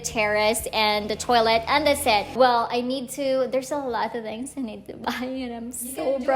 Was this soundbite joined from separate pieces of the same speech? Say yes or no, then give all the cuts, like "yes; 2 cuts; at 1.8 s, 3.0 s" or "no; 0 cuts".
no; 0 cuts